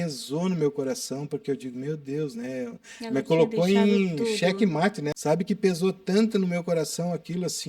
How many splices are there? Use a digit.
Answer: 1